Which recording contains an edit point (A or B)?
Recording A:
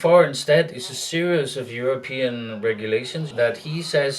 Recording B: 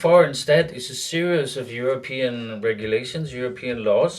A